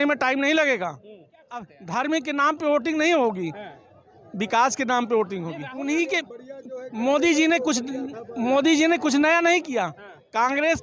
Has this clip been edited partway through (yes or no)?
yes